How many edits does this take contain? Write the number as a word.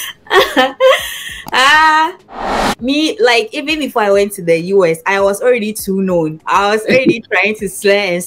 two